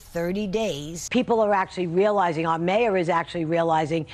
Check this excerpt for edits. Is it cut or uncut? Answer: uncut